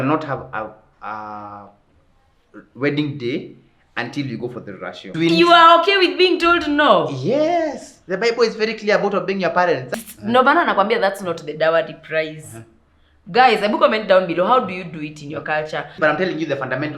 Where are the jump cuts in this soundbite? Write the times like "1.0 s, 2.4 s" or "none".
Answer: 5.1 s, 9.9 s, 16.0 s

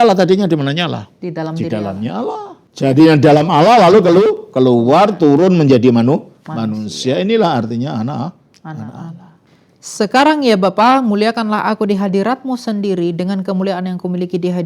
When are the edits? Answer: 2.6 s, 9.4 s

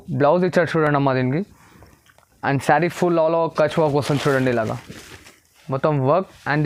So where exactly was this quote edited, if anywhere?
none

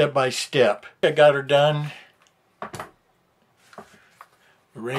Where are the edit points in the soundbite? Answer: 1.0 s

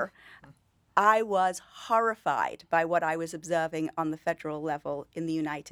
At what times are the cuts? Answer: none

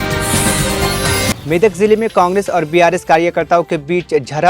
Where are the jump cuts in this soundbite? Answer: none

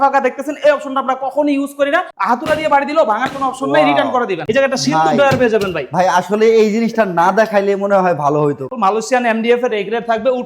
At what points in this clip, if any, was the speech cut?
2.1 s, 4.4 s, 8.7 s

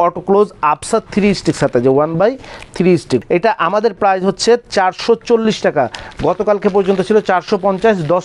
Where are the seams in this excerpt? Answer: 3.2 s

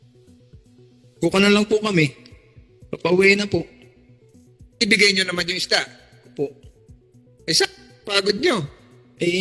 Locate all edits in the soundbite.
1.2 s

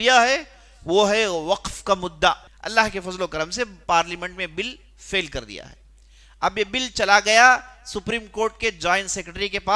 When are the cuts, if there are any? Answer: 2.5 s

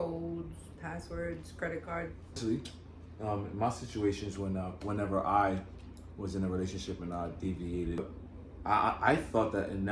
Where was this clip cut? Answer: 2.4 s, 8.0 s

